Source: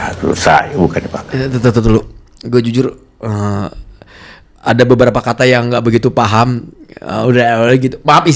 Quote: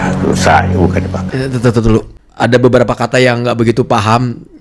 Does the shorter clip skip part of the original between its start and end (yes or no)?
yes